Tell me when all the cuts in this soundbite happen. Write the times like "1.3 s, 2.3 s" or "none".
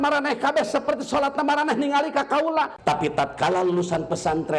2.7 s